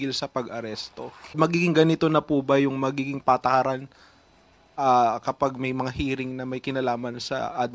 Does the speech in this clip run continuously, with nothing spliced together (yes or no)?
no